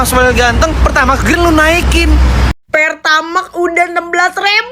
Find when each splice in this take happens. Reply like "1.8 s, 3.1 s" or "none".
2.5 s